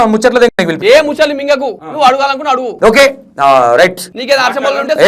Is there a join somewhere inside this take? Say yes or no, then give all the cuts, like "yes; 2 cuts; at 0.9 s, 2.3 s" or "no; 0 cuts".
yes; 3 cuts; at 1.8 s, 2.7 s, 4.1 s